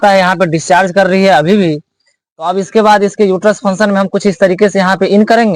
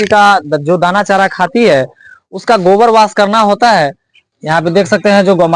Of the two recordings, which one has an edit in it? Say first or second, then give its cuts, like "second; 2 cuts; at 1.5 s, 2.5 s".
second; 1 cut; at 4.3 s